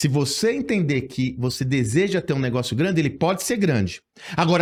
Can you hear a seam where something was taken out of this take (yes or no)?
no